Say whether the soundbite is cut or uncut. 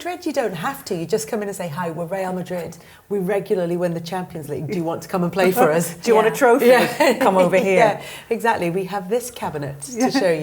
uncut